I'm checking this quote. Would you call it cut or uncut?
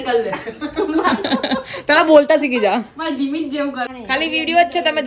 cut